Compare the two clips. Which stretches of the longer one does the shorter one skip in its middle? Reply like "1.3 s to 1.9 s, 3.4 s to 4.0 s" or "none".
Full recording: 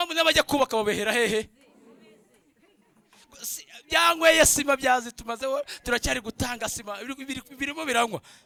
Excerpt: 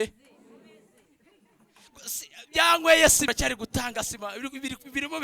4.6 s to 5.9 s